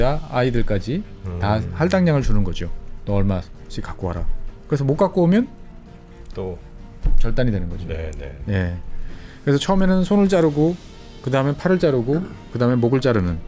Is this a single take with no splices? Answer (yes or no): yes